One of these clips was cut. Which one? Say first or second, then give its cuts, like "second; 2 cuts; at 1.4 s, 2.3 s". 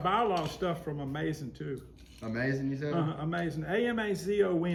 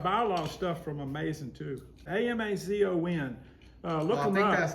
second; 1 cut; at 2.0 s